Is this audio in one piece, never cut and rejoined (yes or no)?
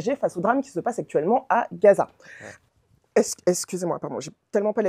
yes